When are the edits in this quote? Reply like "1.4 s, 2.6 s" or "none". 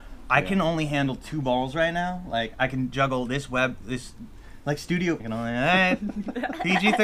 5.2 s

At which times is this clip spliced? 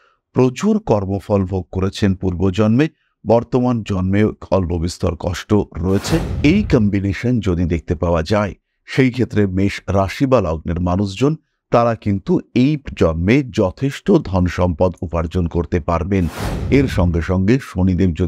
6.3 s, 16.5 s

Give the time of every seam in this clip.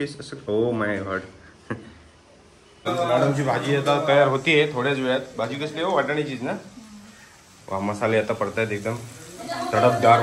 2.6 s

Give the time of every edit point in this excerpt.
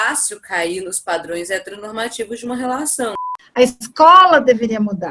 3.4 s

